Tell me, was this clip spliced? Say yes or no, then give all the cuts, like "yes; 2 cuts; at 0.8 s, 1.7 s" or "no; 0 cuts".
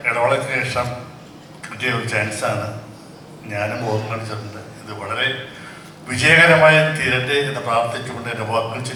no; 0 cuts